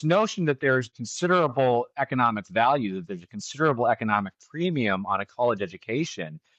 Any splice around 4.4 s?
no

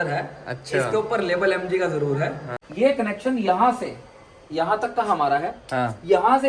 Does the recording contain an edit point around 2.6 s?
yes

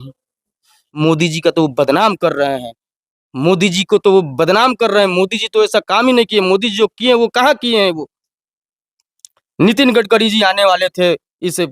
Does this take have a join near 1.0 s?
yes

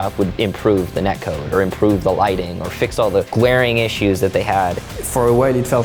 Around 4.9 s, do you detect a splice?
yes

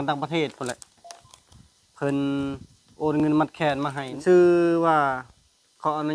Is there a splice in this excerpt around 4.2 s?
yes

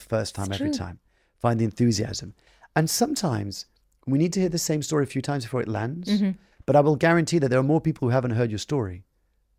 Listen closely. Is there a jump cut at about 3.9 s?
no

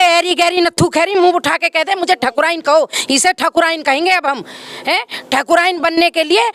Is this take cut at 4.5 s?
no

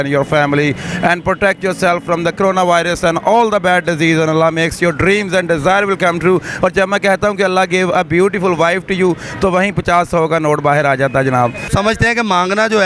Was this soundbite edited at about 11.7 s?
yes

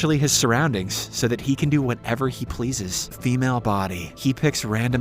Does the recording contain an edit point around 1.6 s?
no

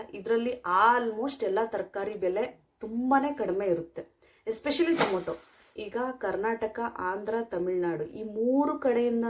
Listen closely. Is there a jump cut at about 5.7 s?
yes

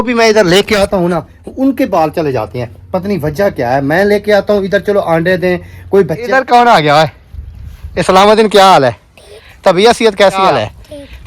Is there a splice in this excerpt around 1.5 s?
no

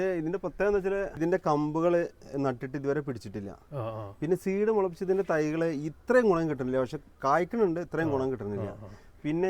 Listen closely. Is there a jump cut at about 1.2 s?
yes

